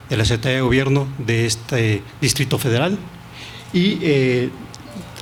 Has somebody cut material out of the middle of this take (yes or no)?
no